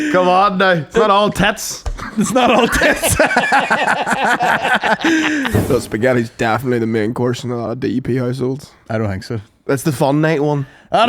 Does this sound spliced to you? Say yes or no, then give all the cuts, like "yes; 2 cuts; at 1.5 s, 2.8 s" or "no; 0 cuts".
yes; 1 cut; at 5.6 s